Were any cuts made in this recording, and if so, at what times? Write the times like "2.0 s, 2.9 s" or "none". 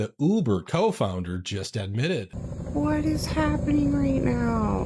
2.3 s